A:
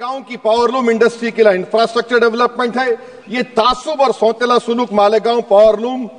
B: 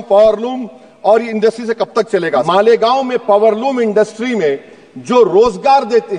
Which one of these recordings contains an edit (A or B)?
B